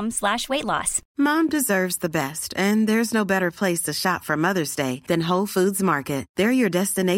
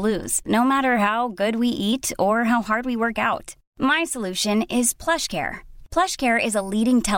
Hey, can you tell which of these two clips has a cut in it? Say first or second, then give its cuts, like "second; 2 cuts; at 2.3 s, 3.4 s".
first; 1 cut; at 1.0 s